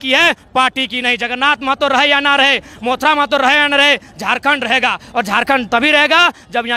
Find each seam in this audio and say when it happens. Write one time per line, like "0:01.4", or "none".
none